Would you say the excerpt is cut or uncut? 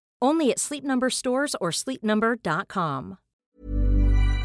cut